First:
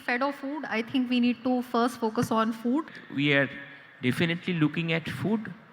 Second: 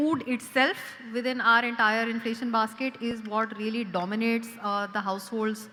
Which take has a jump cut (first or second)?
first